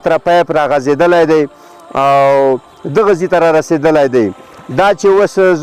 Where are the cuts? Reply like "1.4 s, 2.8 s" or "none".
none